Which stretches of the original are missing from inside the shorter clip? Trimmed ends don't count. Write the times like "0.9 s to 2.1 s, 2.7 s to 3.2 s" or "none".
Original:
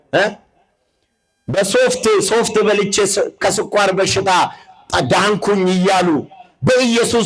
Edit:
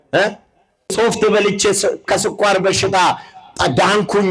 0.9 s to 2.3 s

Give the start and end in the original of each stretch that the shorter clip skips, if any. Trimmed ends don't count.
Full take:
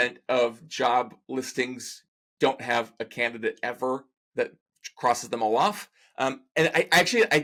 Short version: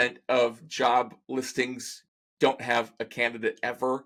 none

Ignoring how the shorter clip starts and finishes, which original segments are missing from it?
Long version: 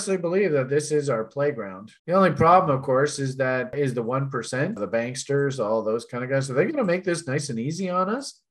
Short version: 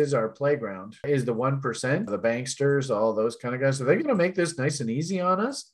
1.9 s to 3.7 s

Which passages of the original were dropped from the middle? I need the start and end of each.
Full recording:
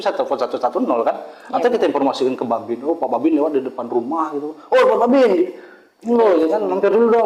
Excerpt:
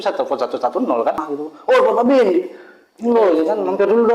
1.2 s to 4.3 s

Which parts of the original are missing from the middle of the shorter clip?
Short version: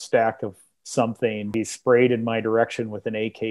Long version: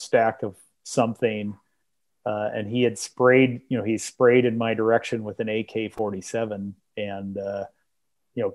1.5 s to 3.8 s

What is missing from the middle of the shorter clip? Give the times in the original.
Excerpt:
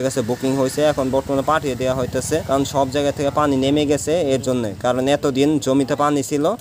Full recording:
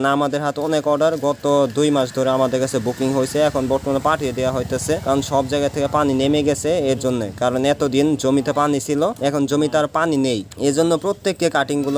none

